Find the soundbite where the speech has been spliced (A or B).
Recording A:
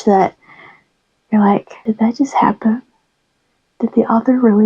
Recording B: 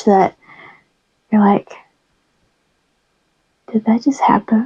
A